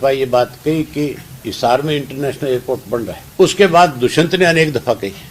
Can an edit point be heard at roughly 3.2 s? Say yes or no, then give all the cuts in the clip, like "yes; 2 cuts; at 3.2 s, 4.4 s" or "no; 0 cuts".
yes; 1 cut; at 3.2 s